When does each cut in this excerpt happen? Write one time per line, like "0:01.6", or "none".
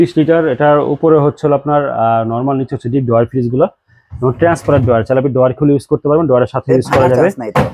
none

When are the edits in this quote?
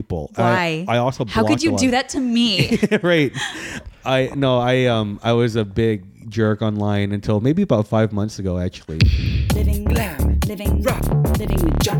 0:08.9

